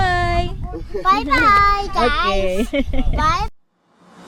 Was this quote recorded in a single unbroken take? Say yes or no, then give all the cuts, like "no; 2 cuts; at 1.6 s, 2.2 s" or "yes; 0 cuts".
yes; 0 cuts